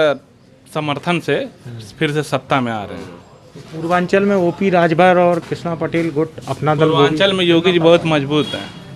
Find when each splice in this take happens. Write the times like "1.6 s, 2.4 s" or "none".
none